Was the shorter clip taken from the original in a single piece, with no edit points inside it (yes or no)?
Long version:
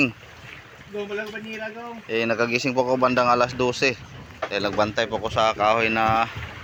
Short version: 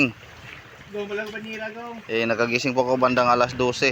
yes